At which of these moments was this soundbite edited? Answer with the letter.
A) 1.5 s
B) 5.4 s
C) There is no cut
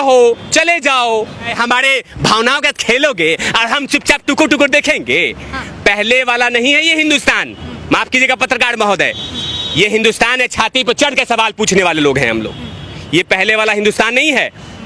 A